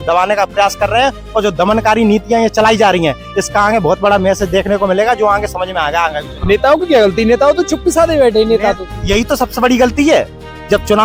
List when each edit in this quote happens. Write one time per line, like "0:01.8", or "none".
none